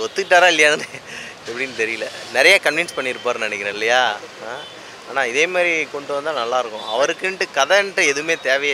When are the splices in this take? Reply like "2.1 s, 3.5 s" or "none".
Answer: none